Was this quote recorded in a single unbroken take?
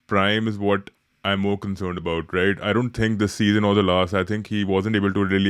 yes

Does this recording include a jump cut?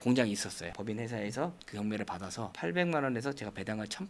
no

